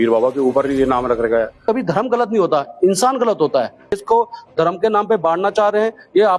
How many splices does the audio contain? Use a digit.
2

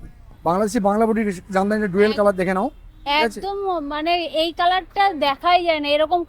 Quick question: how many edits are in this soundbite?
0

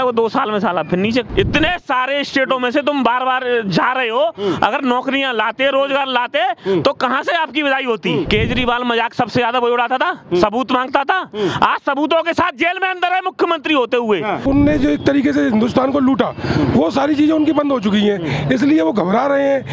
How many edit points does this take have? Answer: 3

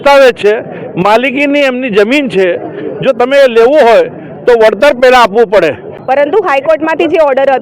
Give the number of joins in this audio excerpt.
1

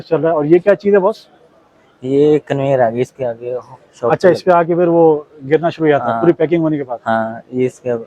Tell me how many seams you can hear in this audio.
0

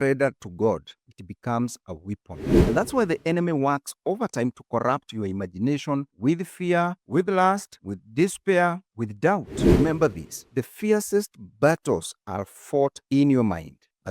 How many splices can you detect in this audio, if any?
2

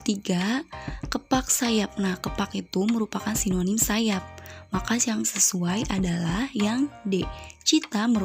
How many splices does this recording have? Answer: 0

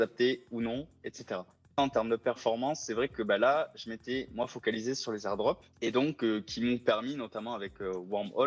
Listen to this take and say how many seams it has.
2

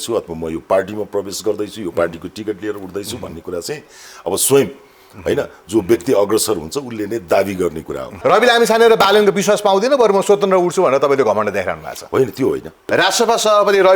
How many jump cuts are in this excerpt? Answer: 2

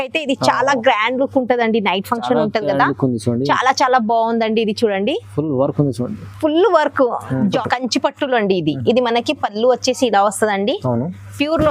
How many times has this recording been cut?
1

